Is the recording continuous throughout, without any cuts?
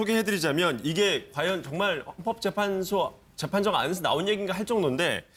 yes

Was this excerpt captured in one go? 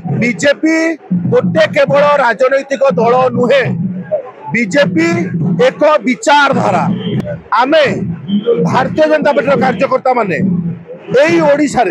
no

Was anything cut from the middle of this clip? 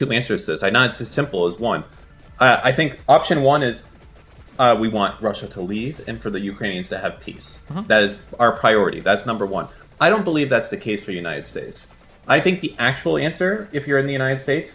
no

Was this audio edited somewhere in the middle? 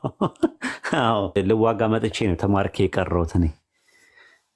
yes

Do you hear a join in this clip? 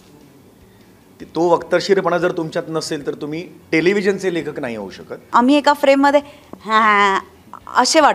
yes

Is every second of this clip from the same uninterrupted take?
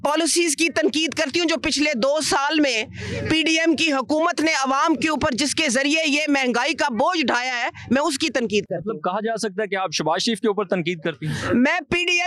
yes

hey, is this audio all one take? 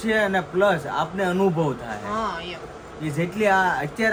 yes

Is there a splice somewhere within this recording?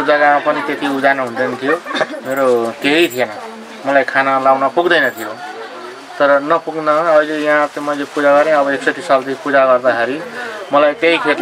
no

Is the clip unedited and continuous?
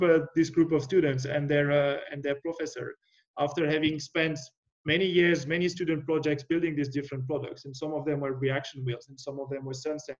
yes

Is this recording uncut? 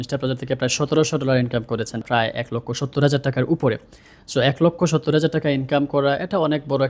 yes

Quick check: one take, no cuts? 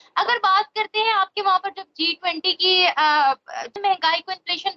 no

